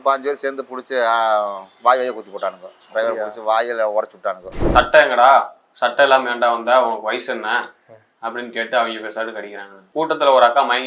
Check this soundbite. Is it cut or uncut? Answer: cut